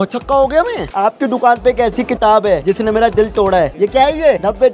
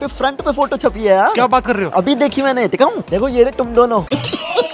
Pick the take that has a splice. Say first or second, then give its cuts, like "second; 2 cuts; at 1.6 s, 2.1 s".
first; 2 cuts; at 0.9 s, 3.7 s